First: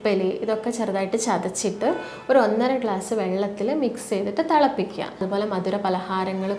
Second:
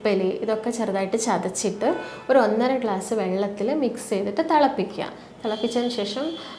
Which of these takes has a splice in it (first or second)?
first